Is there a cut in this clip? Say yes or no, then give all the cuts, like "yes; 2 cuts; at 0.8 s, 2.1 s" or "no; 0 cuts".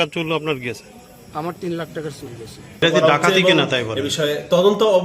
yes; 1 cut; at 2.8 s